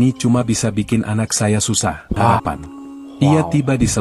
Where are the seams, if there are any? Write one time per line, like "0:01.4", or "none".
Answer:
0:02.1